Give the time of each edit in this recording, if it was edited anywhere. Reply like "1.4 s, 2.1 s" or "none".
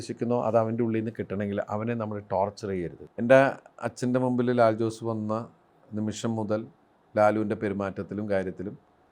3.0 s